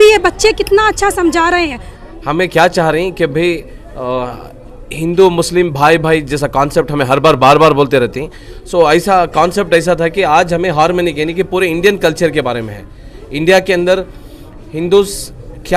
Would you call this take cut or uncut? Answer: cut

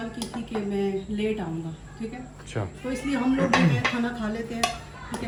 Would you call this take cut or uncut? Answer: uncut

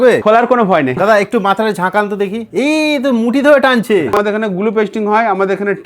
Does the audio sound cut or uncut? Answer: cut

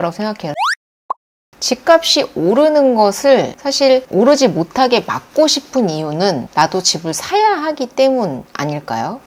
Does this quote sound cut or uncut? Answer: cut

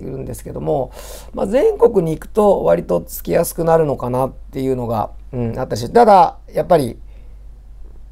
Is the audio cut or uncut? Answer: uncut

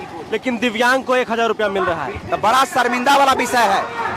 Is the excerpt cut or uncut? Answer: cut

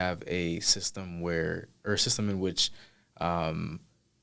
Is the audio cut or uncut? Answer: uncut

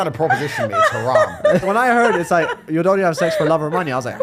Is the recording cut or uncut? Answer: cut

